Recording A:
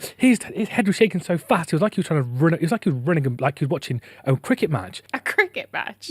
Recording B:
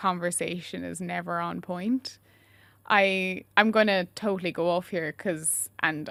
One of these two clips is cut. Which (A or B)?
A